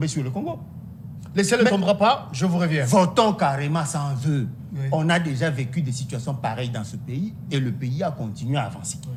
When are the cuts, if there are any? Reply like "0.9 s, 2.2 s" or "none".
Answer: none